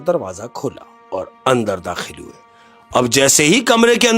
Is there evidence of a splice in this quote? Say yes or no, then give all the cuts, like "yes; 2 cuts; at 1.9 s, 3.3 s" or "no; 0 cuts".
yes; 1 cut; at 0.9 s